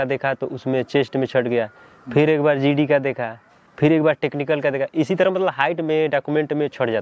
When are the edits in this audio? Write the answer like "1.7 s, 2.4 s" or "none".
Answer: none